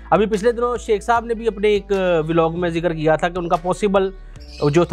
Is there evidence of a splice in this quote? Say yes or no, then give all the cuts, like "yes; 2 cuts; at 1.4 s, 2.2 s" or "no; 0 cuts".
no; 0 cuts